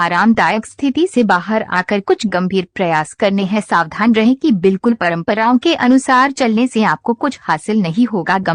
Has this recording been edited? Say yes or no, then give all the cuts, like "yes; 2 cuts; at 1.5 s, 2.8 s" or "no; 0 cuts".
yes; 1 cut; at 1.1 s